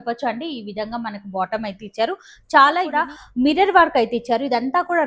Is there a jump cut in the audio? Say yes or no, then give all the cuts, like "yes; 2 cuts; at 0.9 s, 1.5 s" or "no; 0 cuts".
yes; 1 cut; at 2.9 s